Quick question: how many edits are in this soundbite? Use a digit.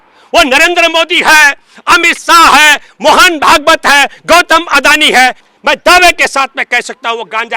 1